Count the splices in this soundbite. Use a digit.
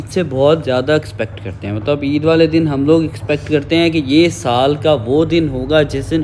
0